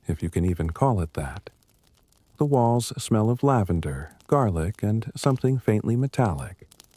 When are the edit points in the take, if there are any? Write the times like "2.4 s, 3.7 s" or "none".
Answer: none